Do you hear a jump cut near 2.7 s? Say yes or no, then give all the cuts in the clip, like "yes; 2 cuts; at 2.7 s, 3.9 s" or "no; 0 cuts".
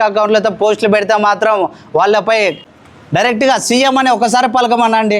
yes; 1 cut; at 2.7 s